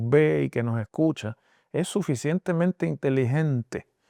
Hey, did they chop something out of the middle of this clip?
no; 0 cuts

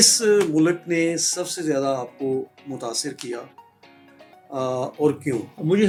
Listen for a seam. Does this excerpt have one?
no; 0 cuts

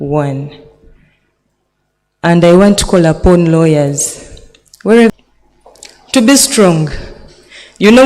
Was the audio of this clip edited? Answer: yes; 1 cut; at 5.1 s

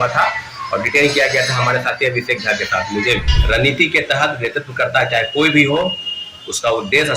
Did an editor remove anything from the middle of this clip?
yes; 1 cut; at 3.3 s

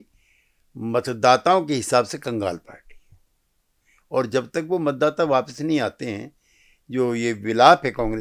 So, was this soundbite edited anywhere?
no; 0 cuts

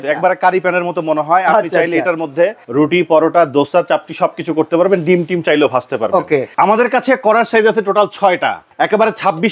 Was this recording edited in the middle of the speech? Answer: yes; 3 cuts; at 2.6 s, 6.5 s, 8.6 s

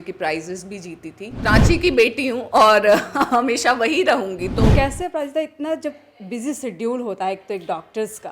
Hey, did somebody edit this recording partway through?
yes; 2 cuts; at 1.3 s, 4.6 s

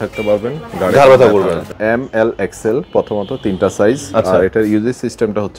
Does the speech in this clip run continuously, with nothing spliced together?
no; 1 cut; at 1.7 s

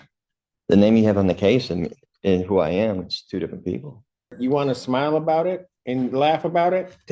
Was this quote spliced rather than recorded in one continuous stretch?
yes; 1 cut; at 4.3 s

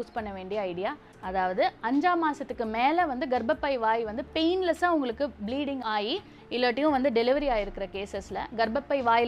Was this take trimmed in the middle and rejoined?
yes; 1 cut; at 1.1 s

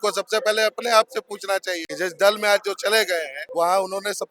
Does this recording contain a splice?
yes; 2 cuts; at 1.9 s, 3.4 s

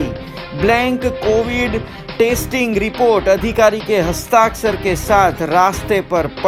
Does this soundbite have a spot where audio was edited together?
no; 0 cuts

